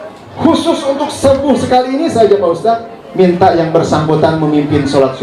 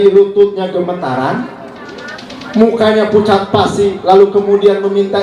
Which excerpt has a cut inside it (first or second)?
first